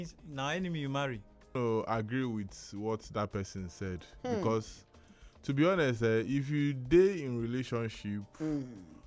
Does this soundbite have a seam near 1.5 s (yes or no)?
yes